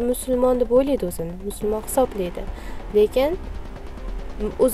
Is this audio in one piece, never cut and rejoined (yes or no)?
yes